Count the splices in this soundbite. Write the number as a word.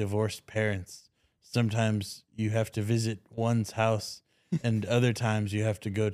zero